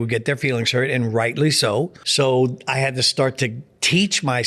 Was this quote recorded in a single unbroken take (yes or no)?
no